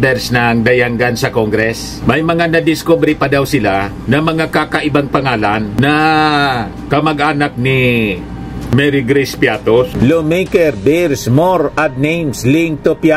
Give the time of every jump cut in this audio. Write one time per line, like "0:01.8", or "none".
0:09.9